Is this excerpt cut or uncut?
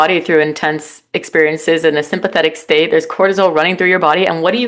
uncut